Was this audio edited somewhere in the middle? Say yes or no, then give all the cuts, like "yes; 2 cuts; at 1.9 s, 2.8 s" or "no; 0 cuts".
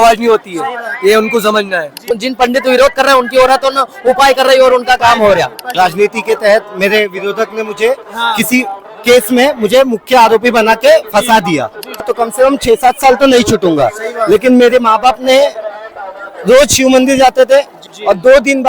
yes; 4 cuts; at 2.0 s, 5.7 s, 12.1 s, 17.8 s